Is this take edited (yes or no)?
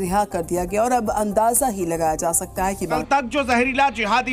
yes